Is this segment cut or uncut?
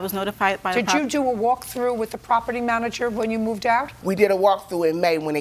cut